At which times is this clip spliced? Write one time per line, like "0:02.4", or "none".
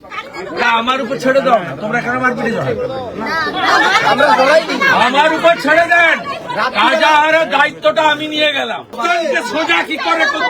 0:09.0